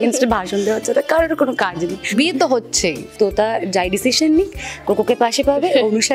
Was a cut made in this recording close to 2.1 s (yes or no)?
yes